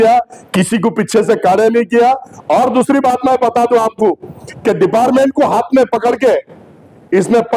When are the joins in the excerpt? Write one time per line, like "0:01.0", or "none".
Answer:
none